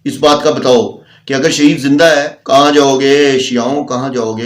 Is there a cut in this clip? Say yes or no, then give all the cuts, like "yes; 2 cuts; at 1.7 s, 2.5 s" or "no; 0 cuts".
yes; 1 cut; at 2.3 s